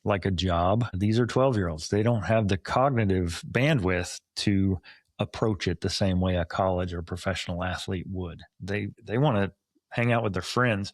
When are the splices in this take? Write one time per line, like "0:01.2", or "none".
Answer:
0:00.9
0:09.0